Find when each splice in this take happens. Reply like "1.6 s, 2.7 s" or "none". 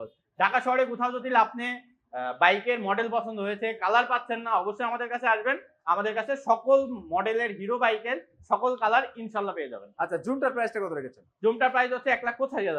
none